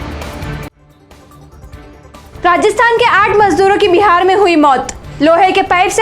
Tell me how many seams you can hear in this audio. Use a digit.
1